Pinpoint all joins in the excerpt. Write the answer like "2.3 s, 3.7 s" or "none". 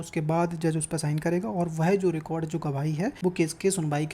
3.2 s